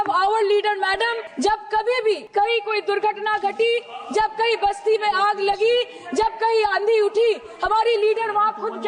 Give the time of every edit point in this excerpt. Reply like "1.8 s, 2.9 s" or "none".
1.2 s, 2.2 s